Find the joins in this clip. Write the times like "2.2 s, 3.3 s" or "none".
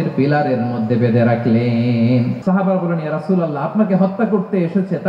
2.4 s